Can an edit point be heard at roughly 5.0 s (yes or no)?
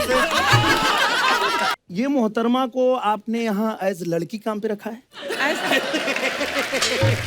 no